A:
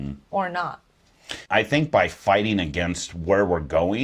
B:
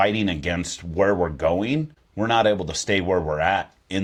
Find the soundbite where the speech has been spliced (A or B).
A